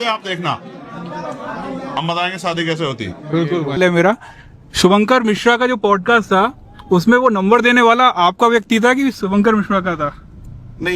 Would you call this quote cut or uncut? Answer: cut